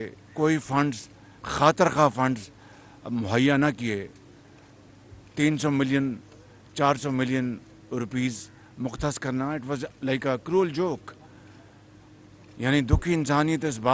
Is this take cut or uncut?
uncut